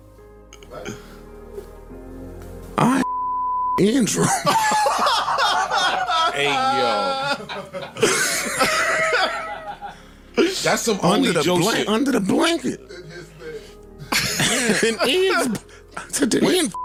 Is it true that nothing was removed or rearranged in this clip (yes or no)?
yes